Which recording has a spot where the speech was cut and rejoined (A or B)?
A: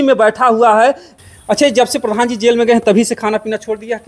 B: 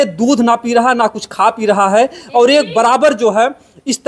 A